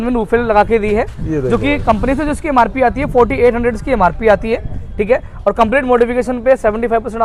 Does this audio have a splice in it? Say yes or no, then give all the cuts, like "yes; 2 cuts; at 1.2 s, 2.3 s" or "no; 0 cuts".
no; 0 cuts